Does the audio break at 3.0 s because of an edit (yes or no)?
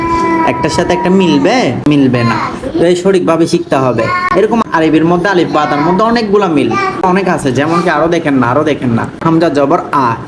no